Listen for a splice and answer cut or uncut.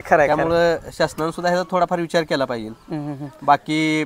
uncut